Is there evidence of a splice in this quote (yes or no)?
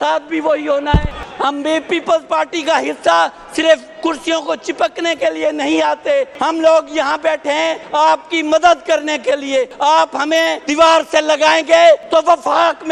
yes